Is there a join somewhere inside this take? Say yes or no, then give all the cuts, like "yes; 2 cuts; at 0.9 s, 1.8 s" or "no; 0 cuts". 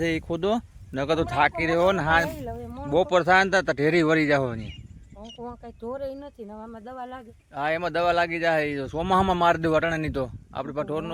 no; 0 cuts